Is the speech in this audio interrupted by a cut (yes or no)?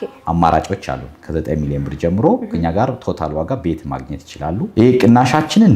yes